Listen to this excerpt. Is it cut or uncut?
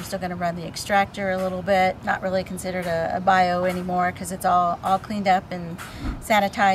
uncut